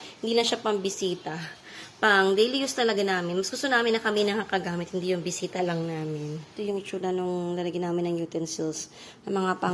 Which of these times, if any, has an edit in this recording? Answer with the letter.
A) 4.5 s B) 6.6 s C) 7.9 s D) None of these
B